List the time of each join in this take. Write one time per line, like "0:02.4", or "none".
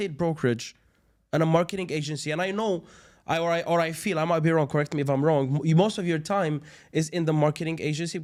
none